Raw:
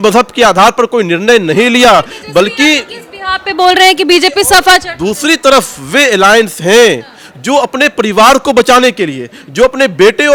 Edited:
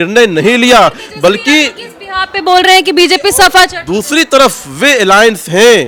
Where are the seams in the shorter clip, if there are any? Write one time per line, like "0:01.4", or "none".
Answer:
none